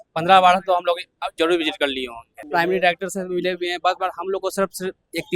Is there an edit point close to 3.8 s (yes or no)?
no